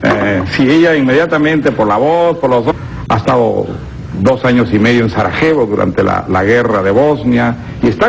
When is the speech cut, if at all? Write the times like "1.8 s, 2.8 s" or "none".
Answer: none